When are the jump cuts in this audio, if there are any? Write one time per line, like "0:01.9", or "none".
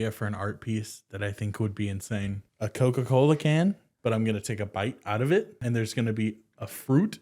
0:02.4
0:03.9
0:05.5